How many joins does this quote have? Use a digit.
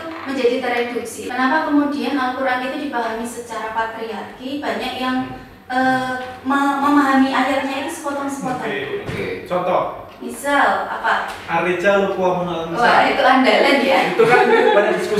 1